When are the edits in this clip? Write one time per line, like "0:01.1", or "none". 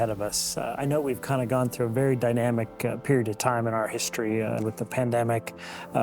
0:04.6